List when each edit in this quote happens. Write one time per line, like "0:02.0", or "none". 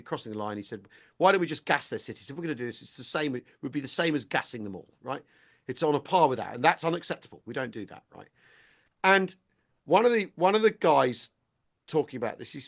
none